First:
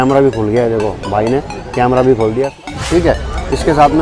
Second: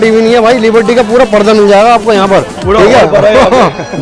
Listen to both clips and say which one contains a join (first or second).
first